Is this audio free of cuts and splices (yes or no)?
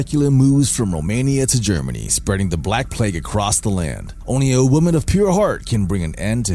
no